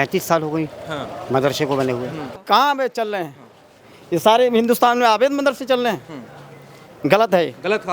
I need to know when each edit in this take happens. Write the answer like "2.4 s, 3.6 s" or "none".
2.3 s